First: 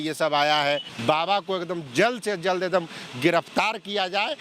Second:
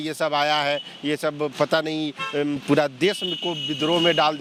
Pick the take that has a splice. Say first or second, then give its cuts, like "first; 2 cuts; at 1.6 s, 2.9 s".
first; 1 cut; at 0.9 s